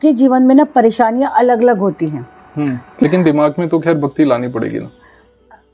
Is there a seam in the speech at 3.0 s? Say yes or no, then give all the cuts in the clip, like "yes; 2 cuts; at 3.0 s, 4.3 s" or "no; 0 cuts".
yes; 1 cut; at 3.0 s